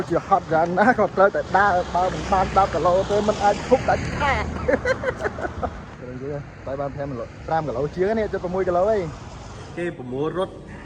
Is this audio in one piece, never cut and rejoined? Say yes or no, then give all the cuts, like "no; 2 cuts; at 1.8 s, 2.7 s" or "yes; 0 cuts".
no; 2 cuts; at 5.8 s, 9.7 s